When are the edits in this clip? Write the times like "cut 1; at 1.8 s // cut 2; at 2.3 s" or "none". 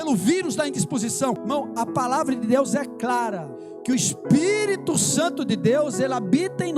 cut 1; at 1.4 s // cut 2; at 3.9 s